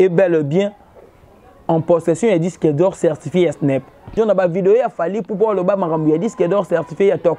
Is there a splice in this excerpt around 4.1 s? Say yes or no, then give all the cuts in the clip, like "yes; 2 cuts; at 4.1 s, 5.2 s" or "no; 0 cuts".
yes; 1 cut; at 4.1 s